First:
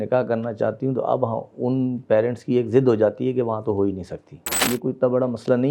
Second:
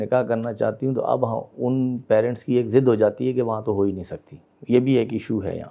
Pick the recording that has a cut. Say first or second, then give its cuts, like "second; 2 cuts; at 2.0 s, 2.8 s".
first; 1 cut; at 4.6 s